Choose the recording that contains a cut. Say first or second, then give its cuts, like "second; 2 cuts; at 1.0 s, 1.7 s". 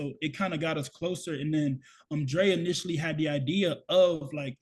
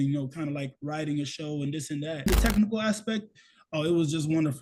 second; 1 cut; at 2.3 s